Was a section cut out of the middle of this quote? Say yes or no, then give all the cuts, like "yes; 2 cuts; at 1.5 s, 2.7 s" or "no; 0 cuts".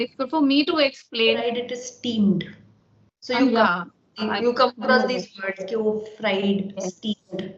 yes; 1 cut; at 1.4 s